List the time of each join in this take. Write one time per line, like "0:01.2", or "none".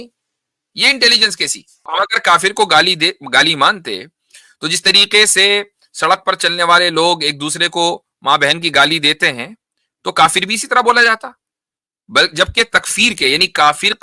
0:01.9